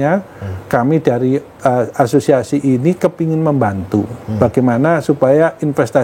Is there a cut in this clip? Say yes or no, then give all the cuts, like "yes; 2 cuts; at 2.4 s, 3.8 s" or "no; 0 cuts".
no; 0 cuts